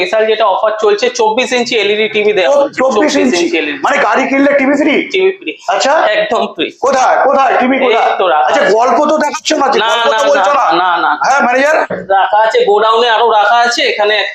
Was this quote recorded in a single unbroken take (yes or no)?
yes